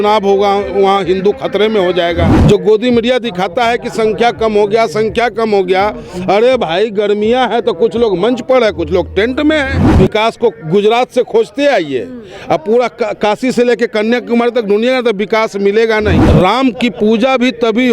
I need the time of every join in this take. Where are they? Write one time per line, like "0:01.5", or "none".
0:02.3
0:09.8
0:16.2